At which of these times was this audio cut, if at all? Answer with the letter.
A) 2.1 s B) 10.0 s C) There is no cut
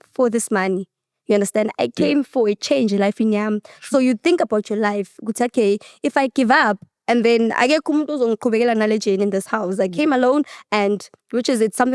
C